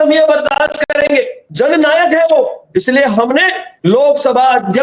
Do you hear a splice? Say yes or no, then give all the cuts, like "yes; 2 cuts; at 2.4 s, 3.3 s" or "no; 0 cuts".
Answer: no; 0 cuts